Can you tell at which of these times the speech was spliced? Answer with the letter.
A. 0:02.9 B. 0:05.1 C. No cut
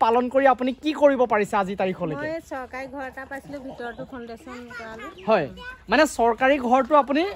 C